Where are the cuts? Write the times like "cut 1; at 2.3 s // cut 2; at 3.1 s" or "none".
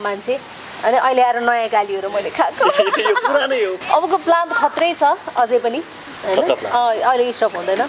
cut 1; at 3.8 s